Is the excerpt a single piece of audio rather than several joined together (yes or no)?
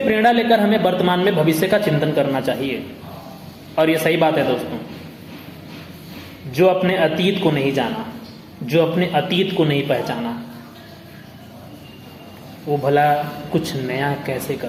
yes